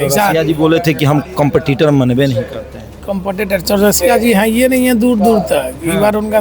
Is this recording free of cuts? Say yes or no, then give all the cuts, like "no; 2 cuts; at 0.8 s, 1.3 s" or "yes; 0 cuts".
yes; 0 cuts